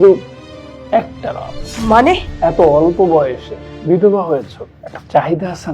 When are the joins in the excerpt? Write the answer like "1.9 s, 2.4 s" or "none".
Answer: 1.6 s, 2.3 s